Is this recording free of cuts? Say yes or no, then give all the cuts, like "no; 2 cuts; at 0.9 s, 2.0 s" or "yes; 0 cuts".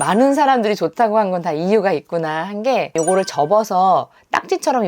no; 1 cut; at 2.9 s